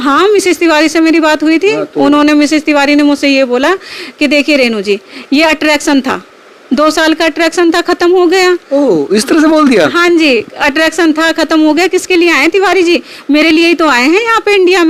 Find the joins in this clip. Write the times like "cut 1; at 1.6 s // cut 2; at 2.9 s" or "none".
none